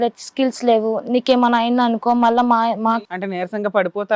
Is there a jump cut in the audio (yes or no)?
yes